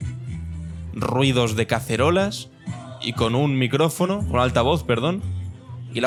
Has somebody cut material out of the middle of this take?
no; 0 cuts

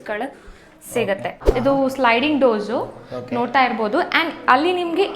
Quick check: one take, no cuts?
no; 1 cut; at 1.4 s

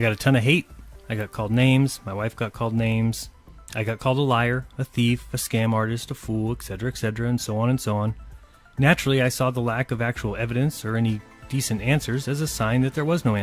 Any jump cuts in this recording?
yes; 1 cut; at 9.3 s

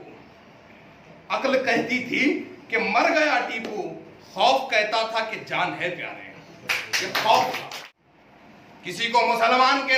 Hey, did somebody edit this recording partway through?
yes; 1 cut; at 7.7 s

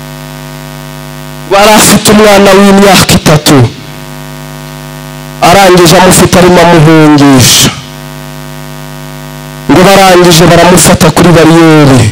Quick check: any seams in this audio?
yes; 1 cut; at 1.4 s

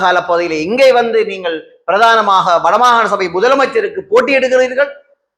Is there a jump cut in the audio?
no; 0 cuts

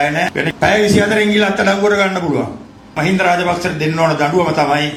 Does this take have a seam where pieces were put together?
no; 0 cuts

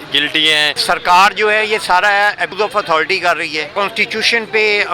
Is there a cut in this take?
yes; 3 cuts; at 0.8 s, 2.5 s, 3.7 s

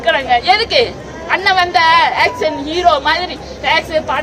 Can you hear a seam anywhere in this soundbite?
no; 0 cuts

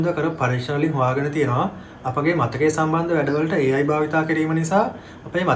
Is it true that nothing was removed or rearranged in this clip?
yes; 0 cuts

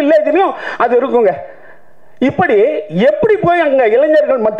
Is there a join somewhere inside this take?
no; 0 cuts

